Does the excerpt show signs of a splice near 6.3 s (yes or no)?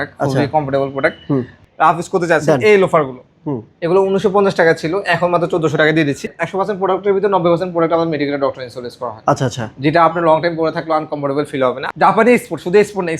yes